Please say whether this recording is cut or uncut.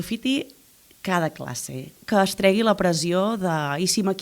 cut